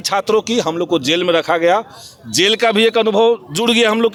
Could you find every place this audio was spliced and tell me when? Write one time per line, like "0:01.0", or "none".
none

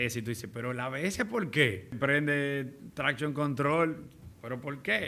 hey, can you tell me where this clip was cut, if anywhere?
0:01.9

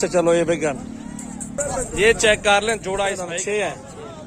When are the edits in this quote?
0:03.2

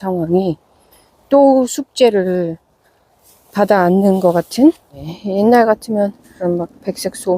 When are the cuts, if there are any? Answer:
0:05.1
0:06.3

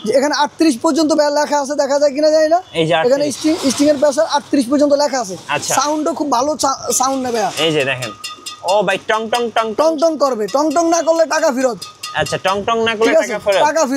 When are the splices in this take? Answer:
none

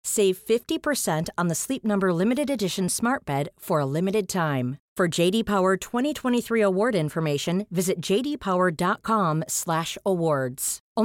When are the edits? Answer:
none

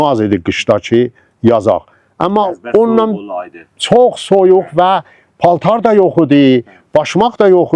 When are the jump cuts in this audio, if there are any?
none

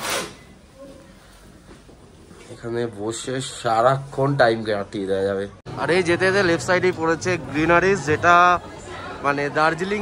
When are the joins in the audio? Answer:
0:05.6

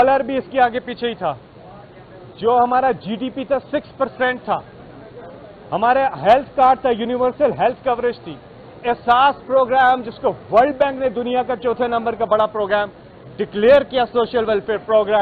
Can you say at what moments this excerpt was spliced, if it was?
none

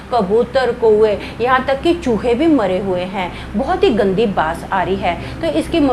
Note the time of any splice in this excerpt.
none

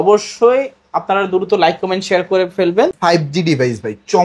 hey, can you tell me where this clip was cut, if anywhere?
0:03.0

